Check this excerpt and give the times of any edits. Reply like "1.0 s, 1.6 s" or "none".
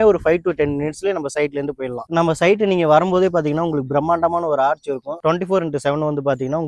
2.0 s, 5.2 s